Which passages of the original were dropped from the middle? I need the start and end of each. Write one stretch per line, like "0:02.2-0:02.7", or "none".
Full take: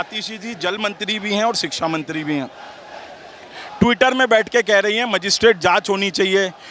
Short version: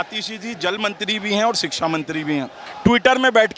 0:02.6-0:03.6